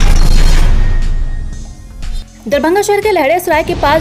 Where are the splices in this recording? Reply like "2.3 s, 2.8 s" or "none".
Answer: none